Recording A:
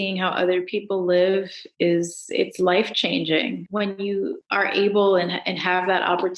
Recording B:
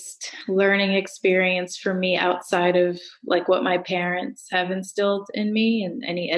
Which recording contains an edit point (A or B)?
A